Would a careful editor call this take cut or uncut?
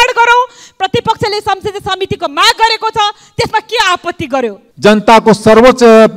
cut